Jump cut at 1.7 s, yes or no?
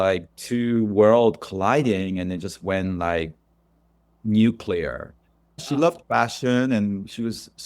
no